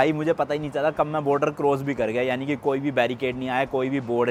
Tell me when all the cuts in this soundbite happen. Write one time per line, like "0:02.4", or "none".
none